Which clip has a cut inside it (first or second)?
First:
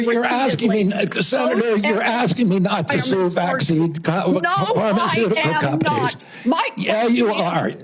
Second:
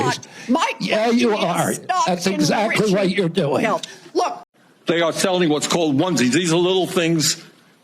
second